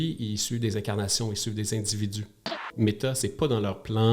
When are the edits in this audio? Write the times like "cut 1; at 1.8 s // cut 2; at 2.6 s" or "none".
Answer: cut 1; at 2.7 s